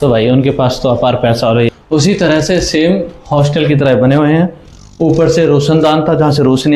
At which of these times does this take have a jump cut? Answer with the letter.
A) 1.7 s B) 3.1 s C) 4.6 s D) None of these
A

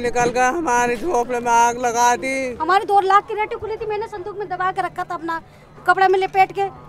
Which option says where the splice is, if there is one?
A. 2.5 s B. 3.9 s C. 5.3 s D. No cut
A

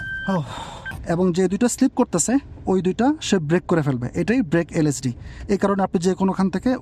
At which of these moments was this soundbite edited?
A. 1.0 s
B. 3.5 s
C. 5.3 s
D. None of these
A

